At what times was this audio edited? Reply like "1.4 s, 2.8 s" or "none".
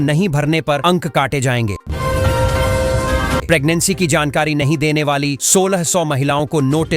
1.8 s, 3.4 s

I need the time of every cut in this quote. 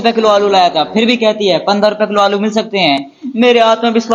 none

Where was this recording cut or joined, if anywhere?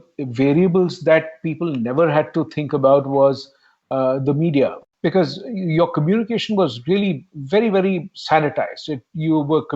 4.8 s

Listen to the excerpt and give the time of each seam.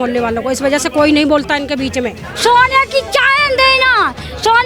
2.2 s

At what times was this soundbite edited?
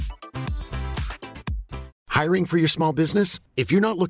1.9 s

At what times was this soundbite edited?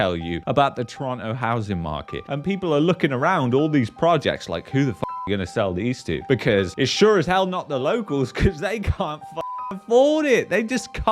2.2 s

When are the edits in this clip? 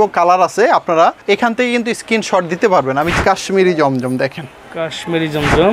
1.2 s, 3.1 s

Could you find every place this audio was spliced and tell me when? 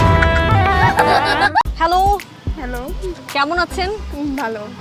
none

